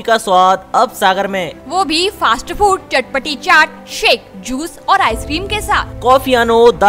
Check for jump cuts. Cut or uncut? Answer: uncut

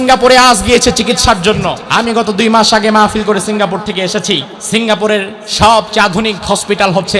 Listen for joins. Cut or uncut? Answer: cut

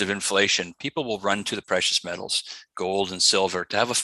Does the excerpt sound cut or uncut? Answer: uncut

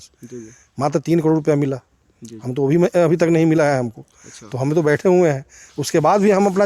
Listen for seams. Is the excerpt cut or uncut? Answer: uncut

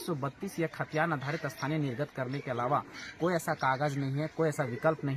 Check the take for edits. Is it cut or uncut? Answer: uncut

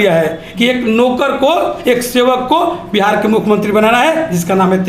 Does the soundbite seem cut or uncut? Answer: uncut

